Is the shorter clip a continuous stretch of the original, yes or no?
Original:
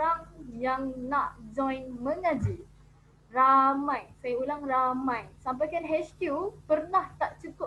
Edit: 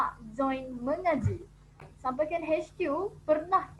no